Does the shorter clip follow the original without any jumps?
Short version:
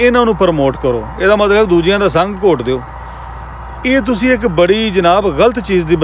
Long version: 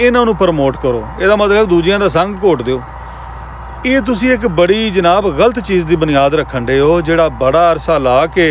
yes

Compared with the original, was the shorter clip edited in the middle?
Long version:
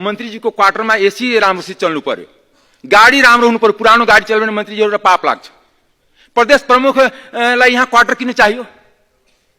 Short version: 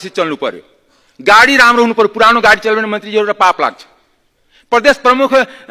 no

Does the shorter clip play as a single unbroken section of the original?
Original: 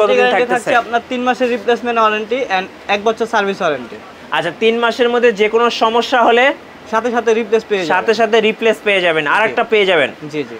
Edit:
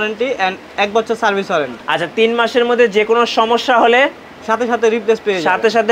no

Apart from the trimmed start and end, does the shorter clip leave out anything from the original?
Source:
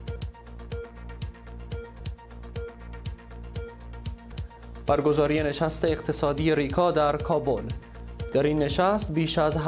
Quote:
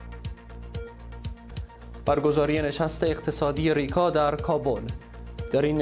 yes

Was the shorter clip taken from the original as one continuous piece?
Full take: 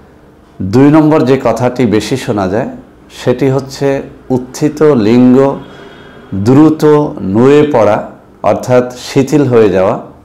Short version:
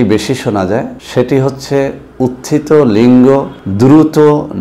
no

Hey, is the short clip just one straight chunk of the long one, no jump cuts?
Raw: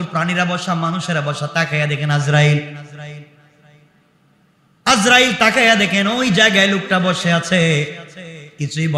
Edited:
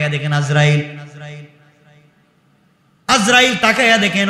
yes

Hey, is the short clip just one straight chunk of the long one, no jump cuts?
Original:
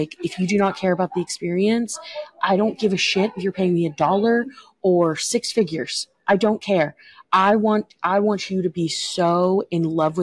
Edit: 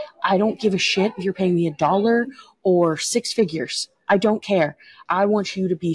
no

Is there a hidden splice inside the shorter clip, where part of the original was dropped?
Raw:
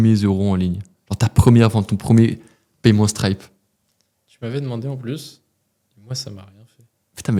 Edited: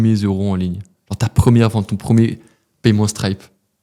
no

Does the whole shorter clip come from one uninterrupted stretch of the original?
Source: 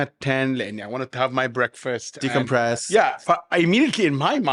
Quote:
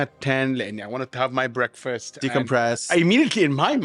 no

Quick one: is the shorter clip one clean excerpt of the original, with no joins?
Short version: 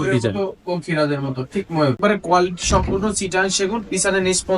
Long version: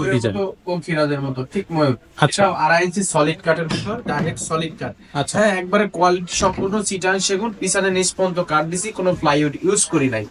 no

